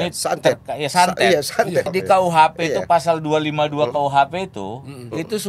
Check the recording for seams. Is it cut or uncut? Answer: cut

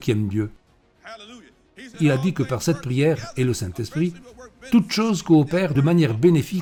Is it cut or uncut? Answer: uncut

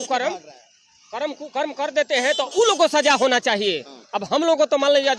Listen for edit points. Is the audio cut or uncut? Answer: uncut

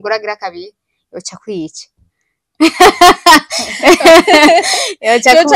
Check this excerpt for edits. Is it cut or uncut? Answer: uncut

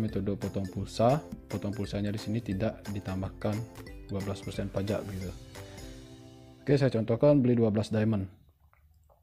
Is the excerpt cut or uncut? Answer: cut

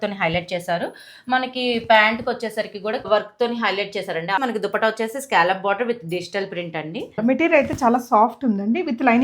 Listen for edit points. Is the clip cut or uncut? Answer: cut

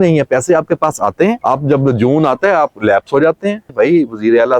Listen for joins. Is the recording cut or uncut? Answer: cut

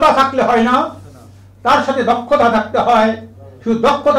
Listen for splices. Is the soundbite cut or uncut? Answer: uncut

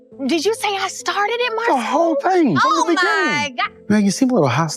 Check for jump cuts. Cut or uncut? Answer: uncut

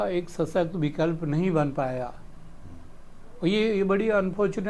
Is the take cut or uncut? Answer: uncut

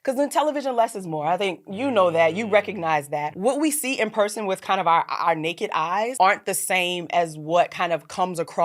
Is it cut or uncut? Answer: cut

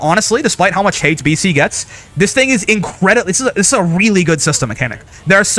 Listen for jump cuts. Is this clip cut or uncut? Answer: uncut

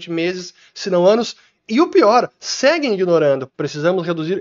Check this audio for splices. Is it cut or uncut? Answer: cut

